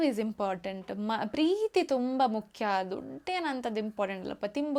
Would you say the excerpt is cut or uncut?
uncut